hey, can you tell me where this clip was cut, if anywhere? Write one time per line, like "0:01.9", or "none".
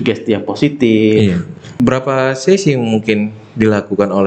0:01.6